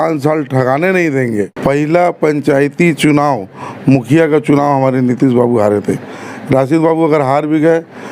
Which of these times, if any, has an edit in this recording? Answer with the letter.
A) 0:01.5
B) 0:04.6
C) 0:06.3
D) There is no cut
A